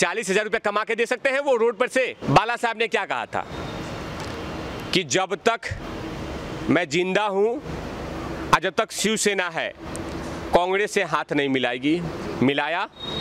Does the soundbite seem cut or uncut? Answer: cut